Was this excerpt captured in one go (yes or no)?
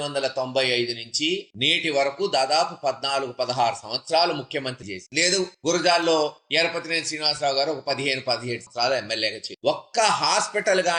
yes